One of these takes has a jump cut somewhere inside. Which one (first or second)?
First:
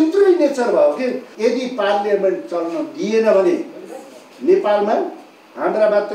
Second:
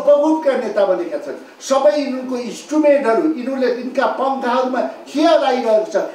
first